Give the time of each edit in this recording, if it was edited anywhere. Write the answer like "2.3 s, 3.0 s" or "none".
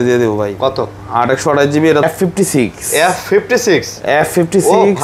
2.0 s